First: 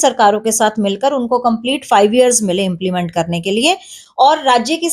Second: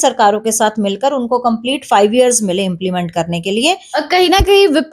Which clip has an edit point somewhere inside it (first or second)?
second